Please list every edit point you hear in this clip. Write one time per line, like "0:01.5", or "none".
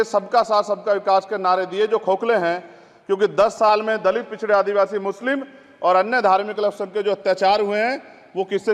none